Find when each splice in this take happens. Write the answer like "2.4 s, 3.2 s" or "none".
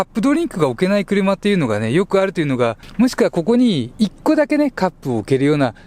2.8 s